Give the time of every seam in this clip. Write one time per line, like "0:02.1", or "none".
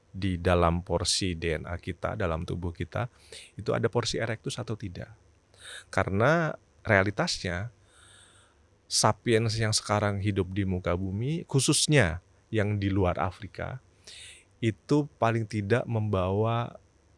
none

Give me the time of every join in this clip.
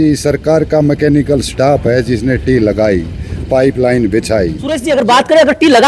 0:04.7

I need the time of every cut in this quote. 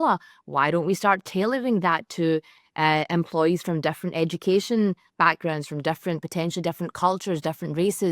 none

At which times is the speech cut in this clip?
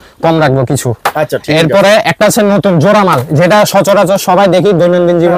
none

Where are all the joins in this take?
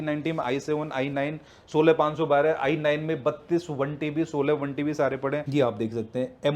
0:05.5

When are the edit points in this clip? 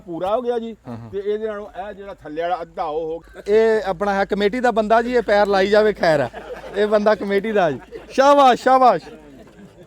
0:03.2

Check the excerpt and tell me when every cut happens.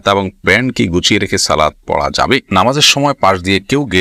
0:02.5

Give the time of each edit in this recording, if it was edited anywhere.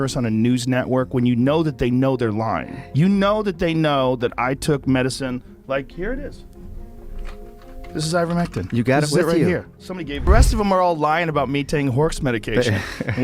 0:10.3

